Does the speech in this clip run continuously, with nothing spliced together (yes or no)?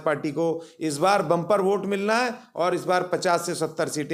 yes